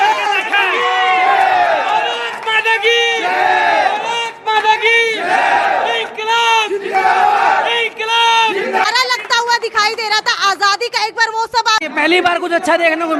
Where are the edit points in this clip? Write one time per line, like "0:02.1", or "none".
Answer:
0:08.8
0:11.8